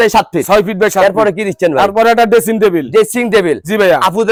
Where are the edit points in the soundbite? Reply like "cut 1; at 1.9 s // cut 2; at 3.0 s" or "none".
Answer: none

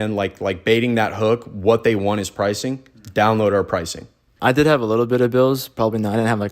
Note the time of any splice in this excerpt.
cut 1; at 4.3 s

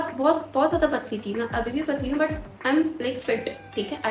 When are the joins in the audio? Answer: none

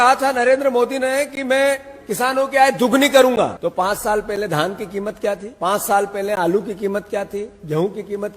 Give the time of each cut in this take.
cut 1; at 3.5 s // cut 2; at 5.5 s

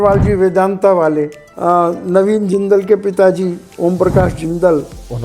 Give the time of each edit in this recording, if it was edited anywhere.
cut 1; at 1.4 s

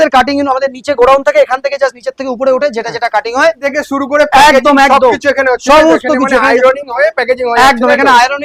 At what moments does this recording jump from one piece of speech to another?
cut 1; at 3.6 s

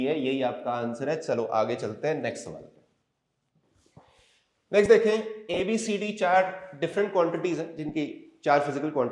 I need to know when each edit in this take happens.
none

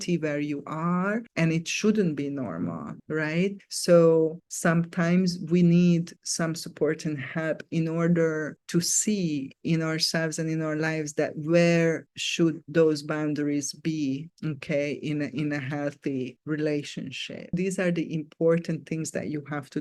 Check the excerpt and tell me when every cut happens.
cut 1; at 17.5 s

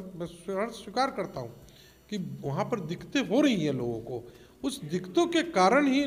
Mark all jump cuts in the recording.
none

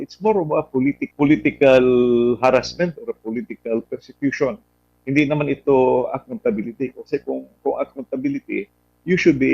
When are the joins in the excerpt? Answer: cut 1; at 1.0 s

